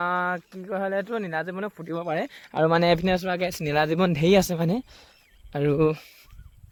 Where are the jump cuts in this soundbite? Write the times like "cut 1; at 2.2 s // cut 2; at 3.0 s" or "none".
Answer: none

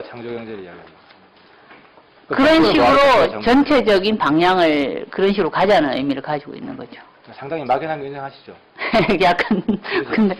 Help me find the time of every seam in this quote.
cut 1; at 5.8 s

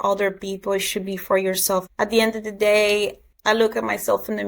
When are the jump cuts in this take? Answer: cut 1; at 1.9 s

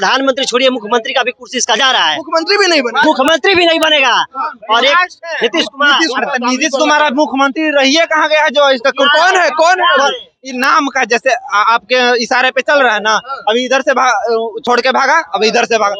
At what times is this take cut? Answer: none

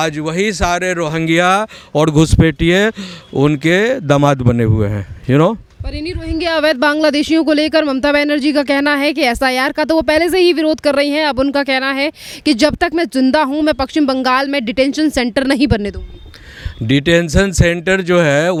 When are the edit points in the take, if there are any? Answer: none

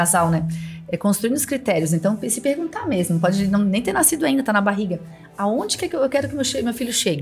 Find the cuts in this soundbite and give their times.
none

